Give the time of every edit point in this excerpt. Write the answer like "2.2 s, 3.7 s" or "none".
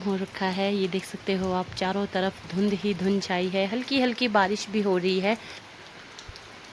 none